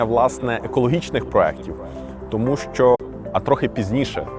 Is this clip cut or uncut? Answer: cut